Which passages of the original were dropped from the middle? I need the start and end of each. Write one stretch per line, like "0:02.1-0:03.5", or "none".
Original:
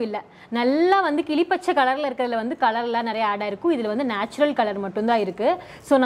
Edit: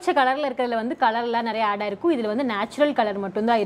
none